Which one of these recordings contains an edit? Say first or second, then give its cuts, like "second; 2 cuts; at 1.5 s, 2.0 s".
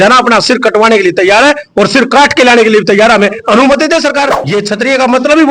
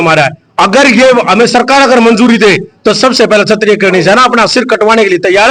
first; 1 cut; at 4.4 s